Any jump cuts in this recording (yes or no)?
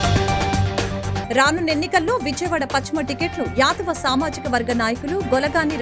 yes